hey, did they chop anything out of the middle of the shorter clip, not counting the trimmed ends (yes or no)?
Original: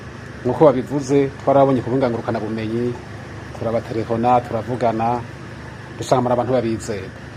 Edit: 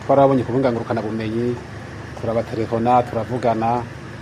no